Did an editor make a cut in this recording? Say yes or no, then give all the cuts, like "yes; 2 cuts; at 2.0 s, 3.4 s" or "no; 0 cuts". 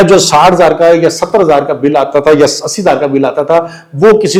no; 0 cuts